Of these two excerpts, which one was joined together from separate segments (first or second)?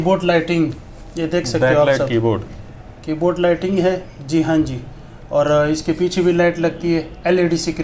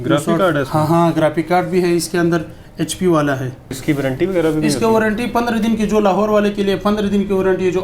second